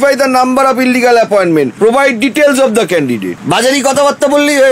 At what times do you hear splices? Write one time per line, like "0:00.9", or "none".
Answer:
0:01.7
0:03.3